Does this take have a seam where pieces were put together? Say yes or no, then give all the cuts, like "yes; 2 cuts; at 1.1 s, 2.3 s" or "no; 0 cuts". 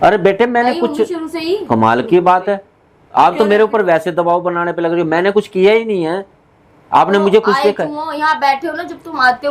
no; 0 cuts